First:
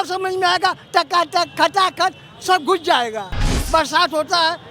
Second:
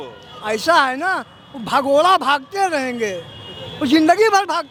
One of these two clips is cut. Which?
first; 1 cut; at 3.5 s

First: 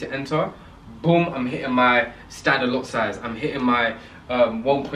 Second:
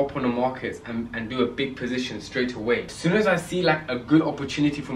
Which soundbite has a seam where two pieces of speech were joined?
second; 1 cut; at 2.9 s

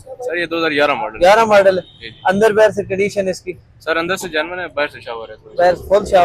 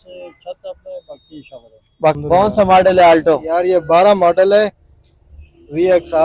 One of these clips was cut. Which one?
second; 1 cut; at 2.2 s

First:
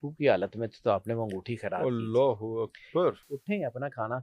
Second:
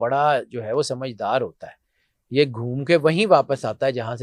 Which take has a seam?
first; 1 cut; at 3.2 s

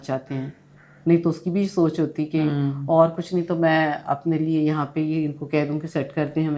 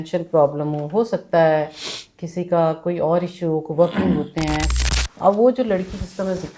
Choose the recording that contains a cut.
second; 1 cut; at 4.7 s

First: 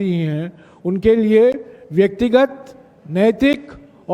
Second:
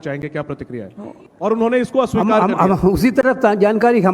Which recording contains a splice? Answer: second; 1 cut; at 1.2 s

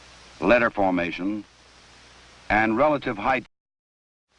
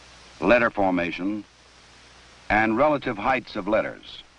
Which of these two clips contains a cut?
second; 1 cut; at 3.5 s

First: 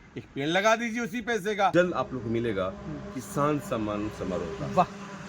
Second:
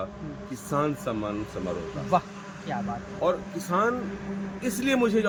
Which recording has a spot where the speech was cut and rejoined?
first; 1 cut; at 1.7 s

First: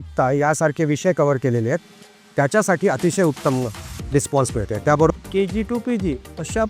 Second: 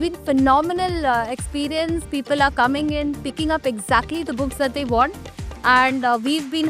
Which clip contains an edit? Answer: first; 1 cut; at 5.1 s

